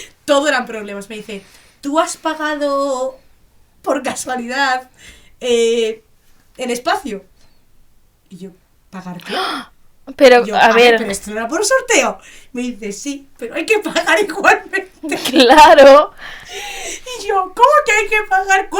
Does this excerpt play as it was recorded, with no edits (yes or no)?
yes